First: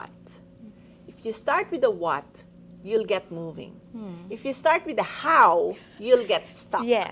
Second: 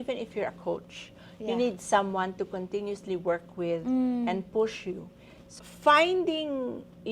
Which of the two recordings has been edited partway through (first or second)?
second